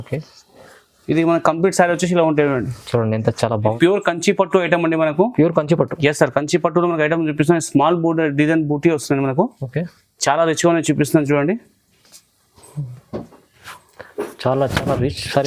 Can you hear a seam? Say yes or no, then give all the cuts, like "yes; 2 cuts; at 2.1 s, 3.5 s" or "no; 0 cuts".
yes; 1 cut; at 3.8 s